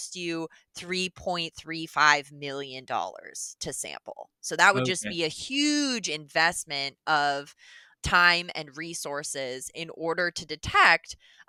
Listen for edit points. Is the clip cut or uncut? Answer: uncut